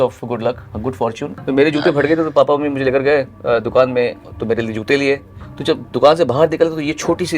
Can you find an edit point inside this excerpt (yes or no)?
yes